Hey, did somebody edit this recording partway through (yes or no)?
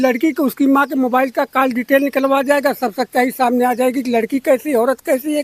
no